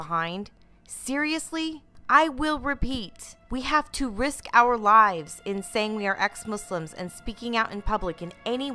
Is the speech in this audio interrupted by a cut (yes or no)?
no